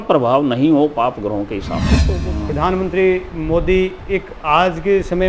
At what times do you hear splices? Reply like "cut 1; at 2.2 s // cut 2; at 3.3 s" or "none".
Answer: cut 1; at 2.1 s